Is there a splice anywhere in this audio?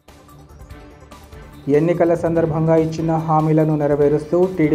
yes; 1 cut; at 1.4 s

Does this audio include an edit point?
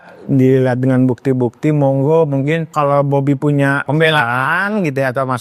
yes; 2 cuts; at 2.7 s, 3.8 s

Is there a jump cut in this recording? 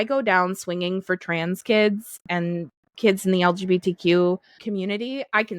yes; 2 cuts; at 2.1 s, 4.6 s

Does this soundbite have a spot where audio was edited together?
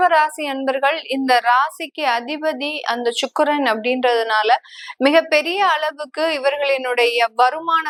no; 0 cuts

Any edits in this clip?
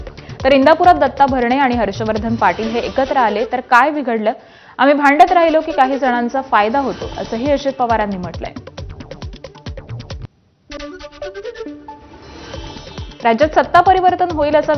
no; 0 cuts

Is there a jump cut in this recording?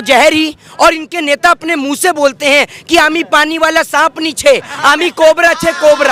no; 0 cuts

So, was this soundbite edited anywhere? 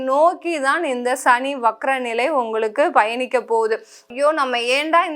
yes; 1 cut; at 4.1 s

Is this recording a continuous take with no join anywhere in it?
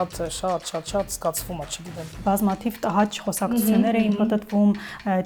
no; 1 cut; at 2.2 s

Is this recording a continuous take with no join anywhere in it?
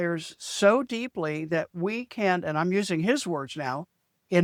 yes; 0 cuts

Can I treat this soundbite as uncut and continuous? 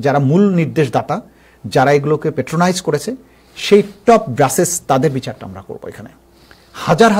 yes; 0 cuts

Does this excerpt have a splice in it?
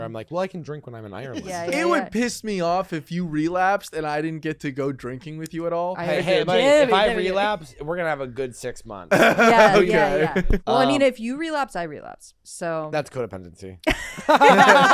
yes; 3 cuts; at 1.5 s, 6.2 s, 10.5 s

